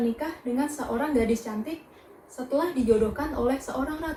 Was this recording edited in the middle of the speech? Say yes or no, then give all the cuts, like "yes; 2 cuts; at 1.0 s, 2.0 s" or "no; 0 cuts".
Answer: no; 0 cuts